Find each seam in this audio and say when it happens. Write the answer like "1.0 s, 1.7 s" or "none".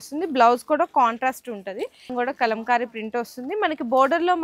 2.1 s